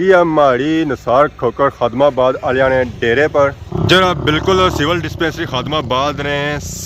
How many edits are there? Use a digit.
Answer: 0